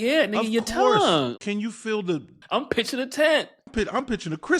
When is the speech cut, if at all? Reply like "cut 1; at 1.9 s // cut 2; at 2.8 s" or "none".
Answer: cut 1; at 1.3 s // cut 2; at 2.3 s // cut 3; at 3.6 s